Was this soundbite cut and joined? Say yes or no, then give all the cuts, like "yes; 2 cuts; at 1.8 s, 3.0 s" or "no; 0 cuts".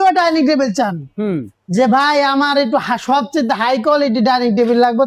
no; 0 cuts